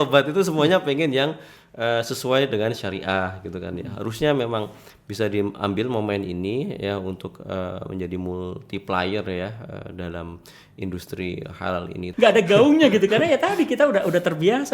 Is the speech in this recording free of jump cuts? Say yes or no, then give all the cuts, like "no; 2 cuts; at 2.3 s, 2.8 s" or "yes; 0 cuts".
no; 1 cut; at 12.0 s